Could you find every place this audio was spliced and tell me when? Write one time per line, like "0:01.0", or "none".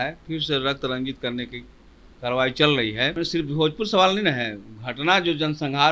0:03.1